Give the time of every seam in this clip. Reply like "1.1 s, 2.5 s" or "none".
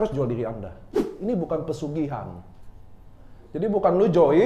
1.1 s